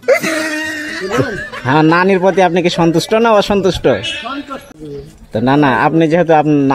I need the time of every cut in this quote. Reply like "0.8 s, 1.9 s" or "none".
1.3 s, 4.7 s